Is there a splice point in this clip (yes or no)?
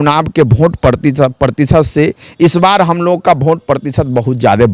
no